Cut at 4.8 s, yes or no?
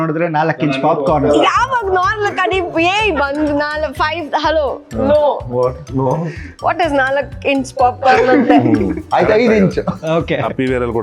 no